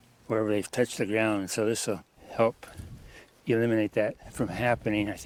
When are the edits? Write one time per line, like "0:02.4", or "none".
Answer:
none